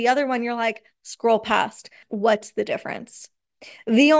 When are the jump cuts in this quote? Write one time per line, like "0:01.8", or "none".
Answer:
0:02.0